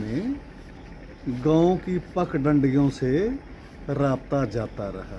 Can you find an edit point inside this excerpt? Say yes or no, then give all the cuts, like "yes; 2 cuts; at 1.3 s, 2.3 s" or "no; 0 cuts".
no; 0 cuts